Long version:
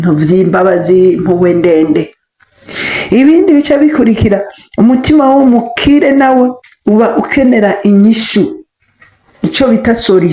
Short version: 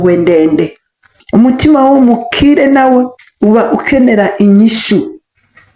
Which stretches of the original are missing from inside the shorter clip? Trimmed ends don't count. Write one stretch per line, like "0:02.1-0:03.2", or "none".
0:02.5-0:04.6